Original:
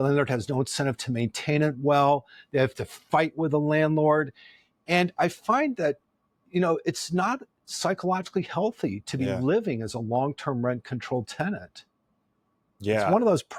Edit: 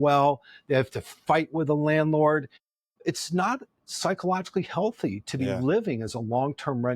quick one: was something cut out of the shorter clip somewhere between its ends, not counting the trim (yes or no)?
yes